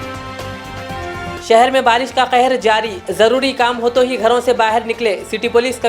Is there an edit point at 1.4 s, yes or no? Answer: yes